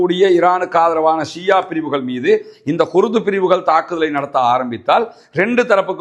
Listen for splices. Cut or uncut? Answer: uncut